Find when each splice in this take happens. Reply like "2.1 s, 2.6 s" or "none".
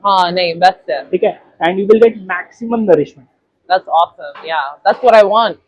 none